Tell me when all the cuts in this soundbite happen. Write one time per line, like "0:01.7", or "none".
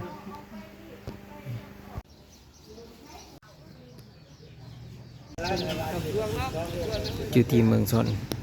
0:02.1
0:03.4
0:05.4